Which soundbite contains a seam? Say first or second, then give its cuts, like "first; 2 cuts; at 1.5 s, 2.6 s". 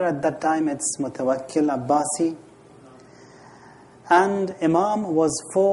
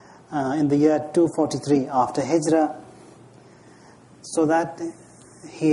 first; 1 cut; at 4.2 s